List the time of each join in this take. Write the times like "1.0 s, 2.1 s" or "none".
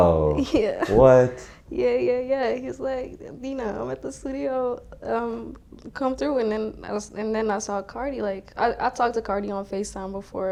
none